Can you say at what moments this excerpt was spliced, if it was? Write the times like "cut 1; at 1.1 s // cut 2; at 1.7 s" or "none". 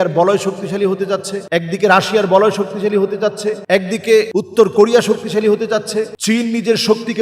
cut 1; at 1.4 s // cut 2; at 3.6 s // cut 3; at 4.3 s // cut 4; at 6.2 s